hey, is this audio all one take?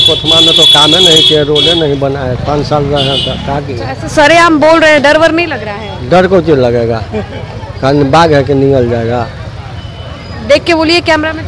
yes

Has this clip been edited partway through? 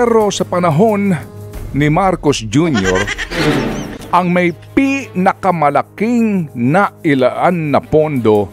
no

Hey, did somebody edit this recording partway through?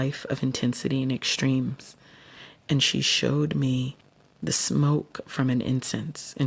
no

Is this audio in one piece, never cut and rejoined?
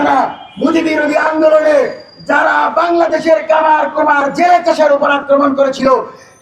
yes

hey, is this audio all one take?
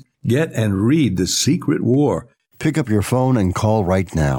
yes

